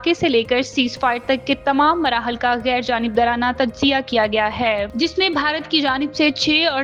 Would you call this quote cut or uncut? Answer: uncut